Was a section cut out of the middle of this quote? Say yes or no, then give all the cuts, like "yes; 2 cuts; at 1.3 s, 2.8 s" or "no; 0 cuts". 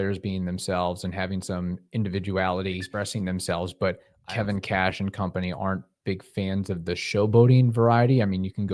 yes; 2 cuts; at 2.9 s, 4.1 s